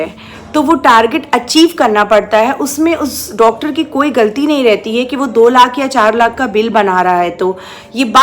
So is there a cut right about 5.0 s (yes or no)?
no